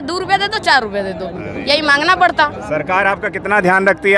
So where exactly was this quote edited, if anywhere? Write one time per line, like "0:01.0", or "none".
none